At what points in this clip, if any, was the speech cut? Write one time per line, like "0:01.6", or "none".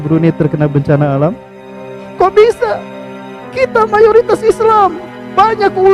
0:02.0